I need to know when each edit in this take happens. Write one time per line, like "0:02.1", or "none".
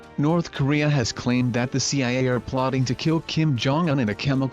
0:01.4
0:03.2